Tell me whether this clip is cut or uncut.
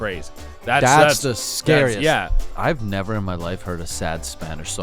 cut